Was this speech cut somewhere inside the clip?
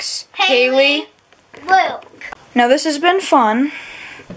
no; 0 cuts

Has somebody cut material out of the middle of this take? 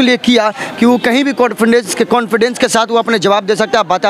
no; 0 cuts

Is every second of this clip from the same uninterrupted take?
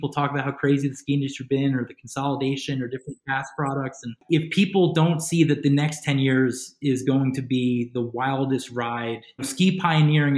no; 2 cuts; at 4.1 s, 9.4 s

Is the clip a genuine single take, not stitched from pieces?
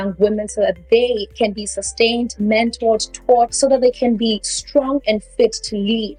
yes; 0 cuts

